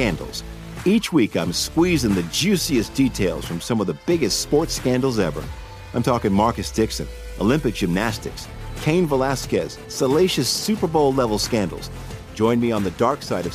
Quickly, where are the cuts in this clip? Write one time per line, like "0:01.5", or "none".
none